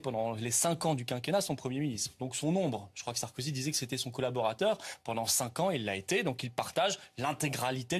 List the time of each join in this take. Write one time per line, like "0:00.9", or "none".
0:06.0